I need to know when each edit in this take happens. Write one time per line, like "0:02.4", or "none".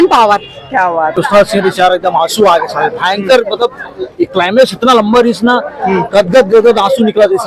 0:01.1